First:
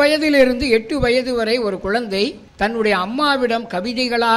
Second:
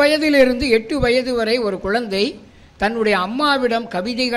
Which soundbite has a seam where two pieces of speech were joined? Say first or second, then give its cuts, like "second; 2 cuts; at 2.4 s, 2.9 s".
first; 1 cut; at 2.4 s